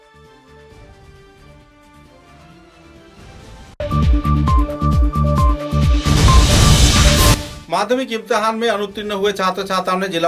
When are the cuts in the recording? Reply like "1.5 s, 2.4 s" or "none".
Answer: 7.5 s